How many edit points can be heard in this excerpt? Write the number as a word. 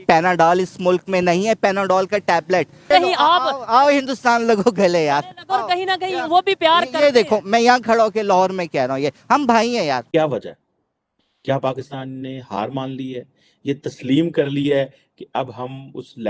two